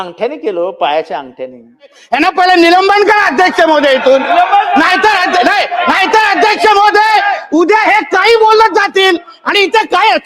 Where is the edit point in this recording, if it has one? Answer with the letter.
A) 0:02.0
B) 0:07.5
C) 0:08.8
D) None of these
A